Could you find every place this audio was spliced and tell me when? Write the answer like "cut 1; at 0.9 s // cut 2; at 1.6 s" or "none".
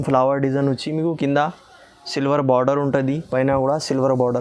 none